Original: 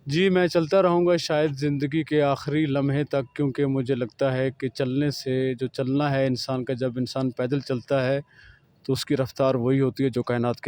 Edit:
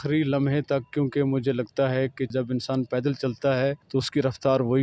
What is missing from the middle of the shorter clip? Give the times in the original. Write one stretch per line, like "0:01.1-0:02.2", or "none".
0:04.7-0:06.8
0:08.3-0:08.8